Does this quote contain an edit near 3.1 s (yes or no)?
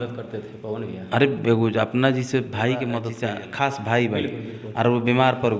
yes